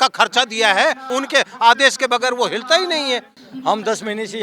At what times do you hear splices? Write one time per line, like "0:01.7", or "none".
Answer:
0:01.1
0:03.3